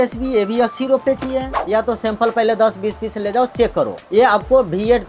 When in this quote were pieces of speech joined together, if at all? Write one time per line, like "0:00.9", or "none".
0:01.5